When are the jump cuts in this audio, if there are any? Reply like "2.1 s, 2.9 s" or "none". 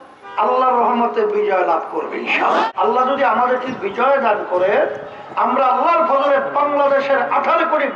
2.6 s